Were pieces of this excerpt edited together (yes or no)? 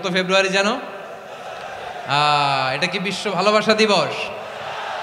no